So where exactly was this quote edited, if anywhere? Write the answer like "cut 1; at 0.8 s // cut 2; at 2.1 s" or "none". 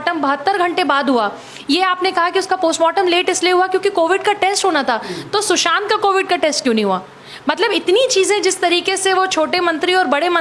none